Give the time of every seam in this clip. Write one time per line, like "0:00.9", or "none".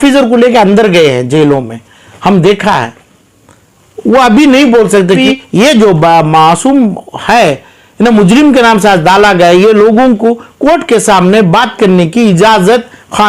0:05.2